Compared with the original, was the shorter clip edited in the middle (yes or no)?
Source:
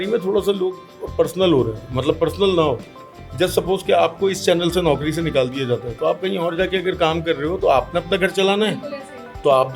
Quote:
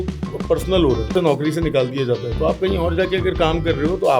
yes